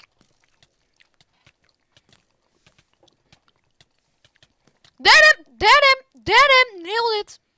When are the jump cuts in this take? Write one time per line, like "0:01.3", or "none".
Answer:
none